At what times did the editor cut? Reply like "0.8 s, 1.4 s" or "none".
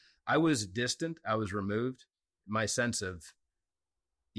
2.1 s